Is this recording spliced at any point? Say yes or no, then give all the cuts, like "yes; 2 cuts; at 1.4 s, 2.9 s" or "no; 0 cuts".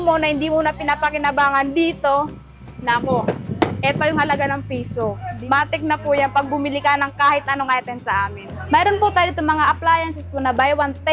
yes; 2 cuts; at 5.3 s, 8.5 s